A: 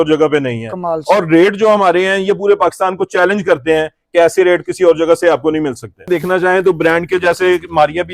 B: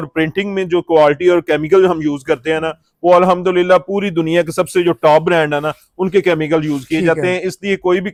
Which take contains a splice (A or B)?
A